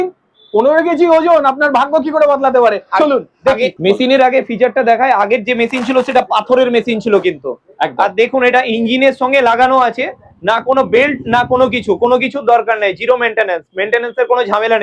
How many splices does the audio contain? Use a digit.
0